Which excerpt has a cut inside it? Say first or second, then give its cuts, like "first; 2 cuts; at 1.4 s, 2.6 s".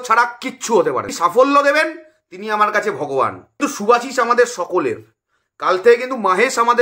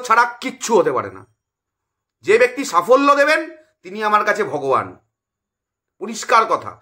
first; 2 cuts; at 1.1 s, 3.5 s